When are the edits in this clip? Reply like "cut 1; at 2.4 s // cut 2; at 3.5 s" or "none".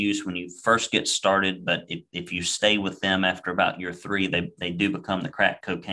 none